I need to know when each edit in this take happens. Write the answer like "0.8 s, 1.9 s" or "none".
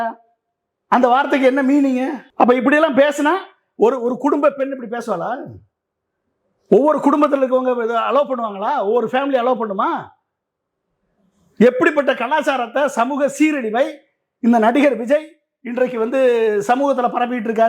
2.2 s